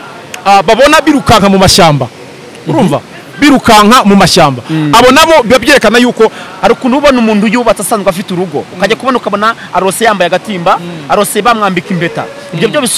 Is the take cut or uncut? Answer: cut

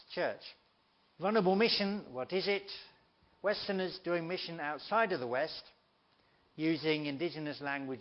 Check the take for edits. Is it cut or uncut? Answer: cut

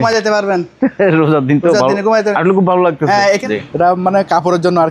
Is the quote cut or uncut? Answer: cut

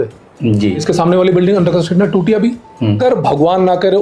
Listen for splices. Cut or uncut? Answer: cut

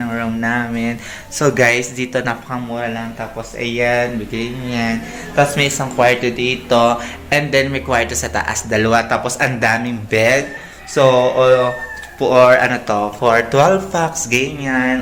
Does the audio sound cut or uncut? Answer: uncut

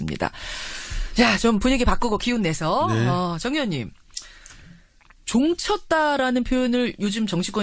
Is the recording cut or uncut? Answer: uncut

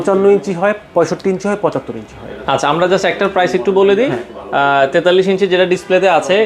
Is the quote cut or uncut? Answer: uncut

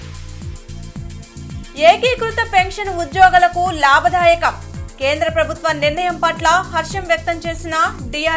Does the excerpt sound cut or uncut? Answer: cut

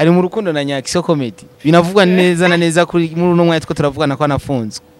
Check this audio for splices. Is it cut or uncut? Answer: uncut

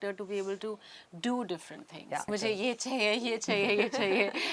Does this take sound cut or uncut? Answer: cut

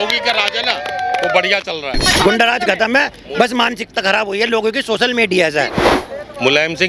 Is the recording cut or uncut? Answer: cut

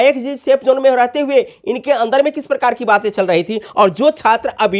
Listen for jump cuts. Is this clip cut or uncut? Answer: uncut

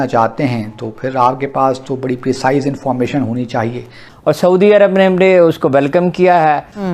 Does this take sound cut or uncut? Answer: cut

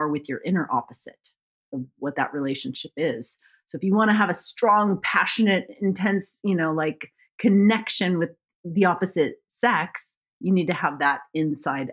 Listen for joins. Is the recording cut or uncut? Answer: uncut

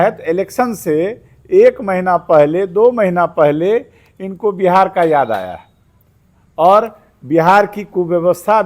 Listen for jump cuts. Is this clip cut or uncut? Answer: uncut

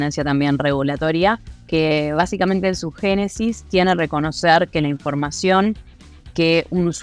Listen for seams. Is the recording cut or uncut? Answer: uncut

